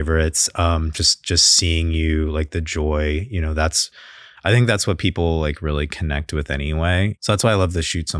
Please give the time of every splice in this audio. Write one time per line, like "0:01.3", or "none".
0:07.2